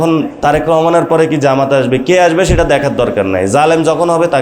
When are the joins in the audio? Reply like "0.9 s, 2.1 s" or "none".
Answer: none